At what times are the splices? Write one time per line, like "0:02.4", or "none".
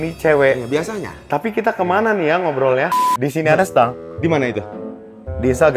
0:03.0